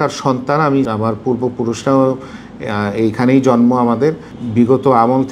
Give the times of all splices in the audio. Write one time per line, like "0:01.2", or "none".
0:00.9
0:04.3